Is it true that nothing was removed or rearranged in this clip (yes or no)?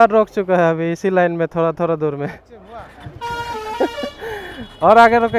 yes